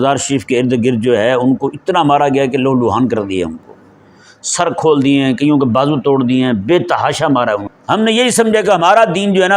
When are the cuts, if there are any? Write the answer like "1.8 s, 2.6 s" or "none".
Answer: 7.7 s